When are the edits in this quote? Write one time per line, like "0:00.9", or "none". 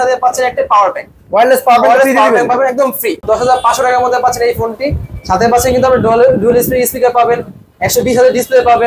0:03.2